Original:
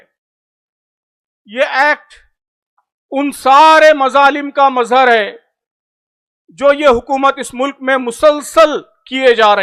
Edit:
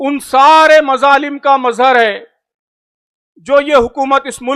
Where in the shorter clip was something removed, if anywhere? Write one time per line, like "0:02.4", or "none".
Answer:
none